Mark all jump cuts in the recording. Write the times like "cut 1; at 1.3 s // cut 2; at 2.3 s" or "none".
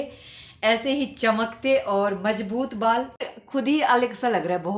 cut 1; at 3.4 s

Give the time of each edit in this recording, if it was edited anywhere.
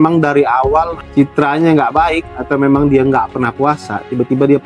cut 1; at 1.0 s

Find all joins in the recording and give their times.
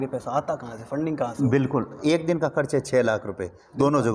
cut 1; at 2.0 s

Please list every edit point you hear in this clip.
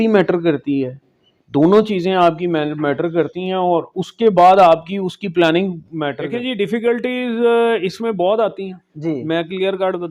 cut 1; at 6.2 s

